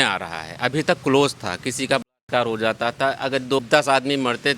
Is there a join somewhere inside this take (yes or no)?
yes